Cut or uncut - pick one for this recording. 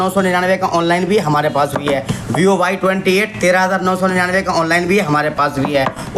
uncut